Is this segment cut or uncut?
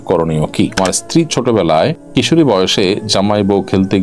cut